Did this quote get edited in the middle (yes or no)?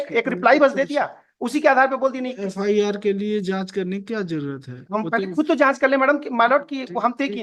no